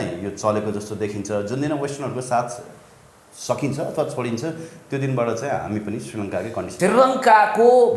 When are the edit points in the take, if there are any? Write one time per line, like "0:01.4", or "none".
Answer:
0:06.7